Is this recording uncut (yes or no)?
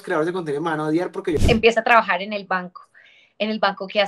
no